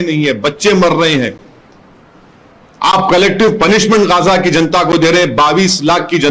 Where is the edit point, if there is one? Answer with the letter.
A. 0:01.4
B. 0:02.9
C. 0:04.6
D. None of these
D